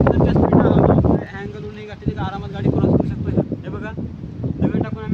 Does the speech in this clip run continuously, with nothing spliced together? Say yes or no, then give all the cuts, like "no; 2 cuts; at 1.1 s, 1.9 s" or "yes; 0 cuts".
no; 2 cuts; at 1.2 s, 3.3 s